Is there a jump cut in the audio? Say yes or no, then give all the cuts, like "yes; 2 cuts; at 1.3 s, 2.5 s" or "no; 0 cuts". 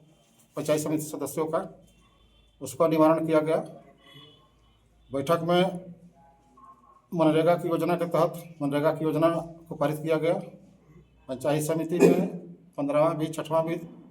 no; 0 cuts